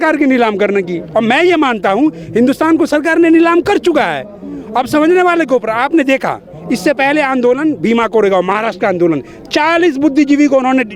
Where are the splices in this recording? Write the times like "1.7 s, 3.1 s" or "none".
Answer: none